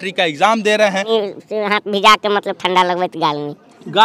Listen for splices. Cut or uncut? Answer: cut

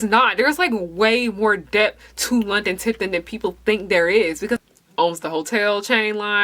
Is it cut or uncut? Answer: cut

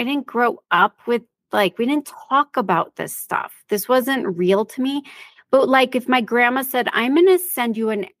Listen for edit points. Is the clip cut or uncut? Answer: uncut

